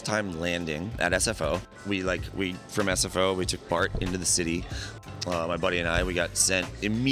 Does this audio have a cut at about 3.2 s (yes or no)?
no